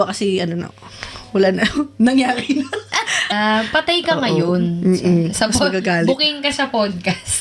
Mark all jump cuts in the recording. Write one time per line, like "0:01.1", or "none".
0:03.3